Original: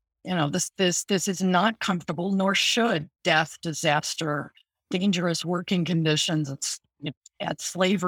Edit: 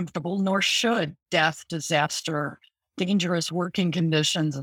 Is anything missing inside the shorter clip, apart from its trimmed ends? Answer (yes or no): no